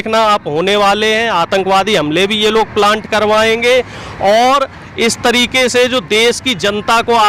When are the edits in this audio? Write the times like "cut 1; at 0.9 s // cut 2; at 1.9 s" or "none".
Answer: none